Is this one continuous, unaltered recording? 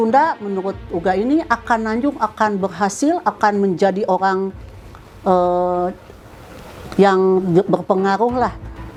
yes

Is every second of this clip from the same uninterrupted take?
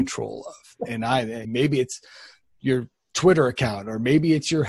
no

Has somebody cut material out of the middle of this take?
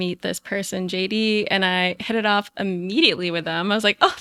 no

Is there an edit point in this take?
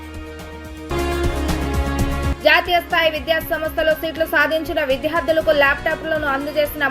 yes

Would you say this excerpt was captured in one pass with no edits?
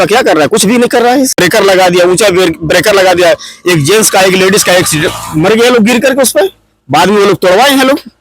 no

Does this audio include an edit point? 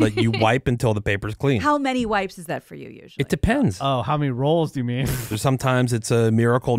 yes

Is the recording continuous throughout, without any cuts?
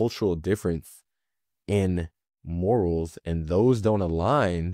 yes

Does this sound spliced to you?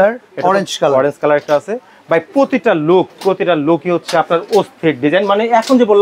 no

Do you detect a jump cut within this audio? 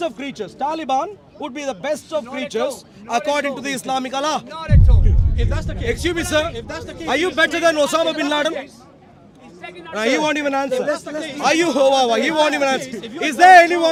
no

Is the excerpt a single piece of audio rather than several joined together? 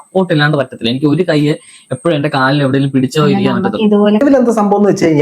no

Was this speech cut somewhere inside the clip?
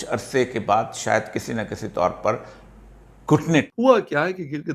yes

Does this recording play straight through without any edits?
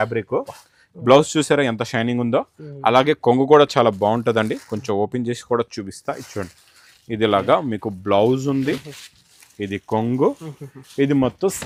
yes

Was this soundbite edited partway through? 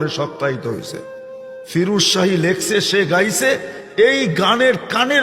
yes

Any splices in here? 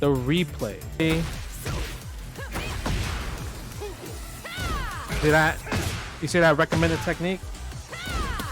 yes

